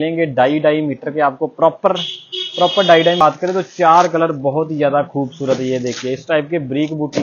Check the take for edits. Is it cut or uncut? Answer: cut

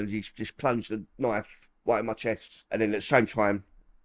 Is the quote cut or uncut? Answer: cut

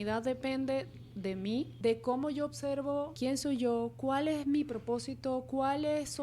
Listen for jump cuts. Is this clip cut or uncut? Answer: cut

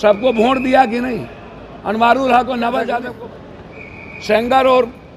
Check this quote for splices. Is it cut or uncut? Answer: cut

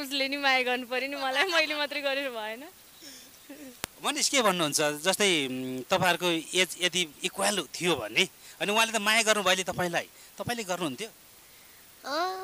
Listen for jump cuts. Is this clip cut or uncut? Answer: uncut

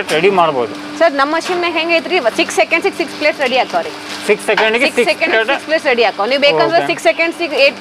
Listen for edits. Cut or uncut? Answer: uncut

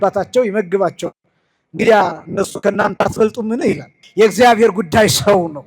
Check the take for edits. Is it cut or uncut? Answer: cut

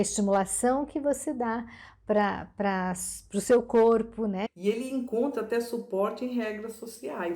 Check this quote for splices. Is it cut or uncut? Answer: cut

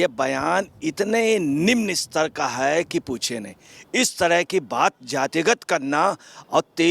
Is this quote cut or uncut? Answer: uncut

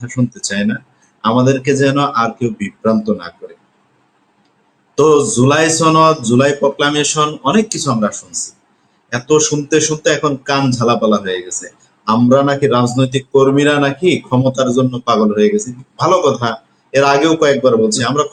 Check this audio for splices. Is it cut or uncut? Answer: uncut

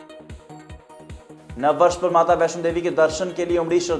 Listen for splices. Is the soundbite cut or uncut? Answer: cut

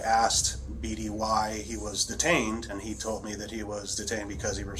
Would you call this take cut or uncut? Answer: cut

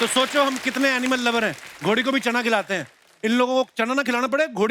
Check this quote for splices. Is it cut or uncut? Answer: uncut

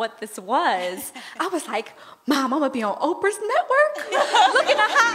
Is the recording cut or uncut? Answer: uncut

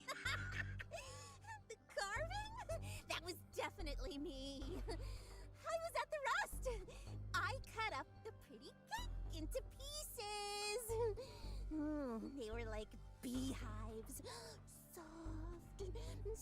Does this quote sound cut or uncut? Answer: uncut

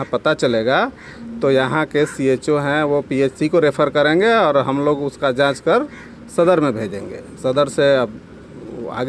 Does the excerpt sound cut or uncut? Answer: uncut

